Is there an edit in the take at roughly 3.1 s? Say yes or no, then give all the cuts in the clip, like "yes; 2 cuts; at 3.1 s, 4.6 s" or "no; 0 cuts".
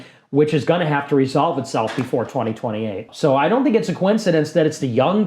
yes; 1 cut; at 3.1 s